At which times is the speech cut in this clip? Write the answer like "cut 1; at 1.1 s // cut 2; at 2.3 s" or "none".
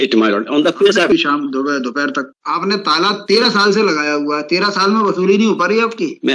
cut 1; at 1.1 s // cut 2; at 2.3 s